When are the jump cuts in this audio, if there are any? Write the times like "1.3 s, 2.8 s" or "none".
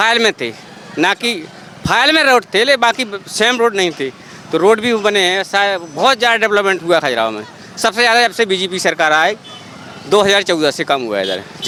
none